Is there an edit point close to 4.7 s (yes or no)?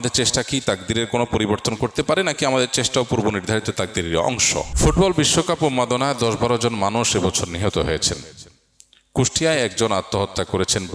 yes